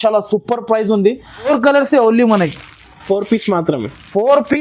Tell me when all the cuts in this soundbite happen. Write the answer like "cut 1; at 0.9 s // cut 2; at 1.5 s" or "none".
cut 1; at 1.5 s